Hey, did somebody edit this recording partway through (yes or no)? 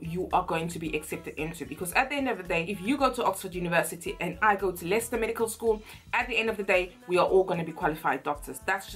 no